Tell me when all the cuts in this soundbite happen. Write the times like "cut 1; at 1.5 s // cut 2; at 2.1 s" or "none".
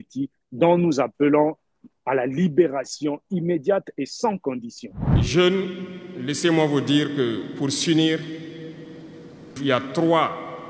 cut 1; at 5.3 s